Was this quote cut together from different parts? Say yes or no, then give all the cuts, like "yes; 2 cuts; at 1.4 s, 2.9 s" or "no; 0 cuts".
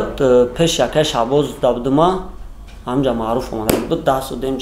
no; 0 cuts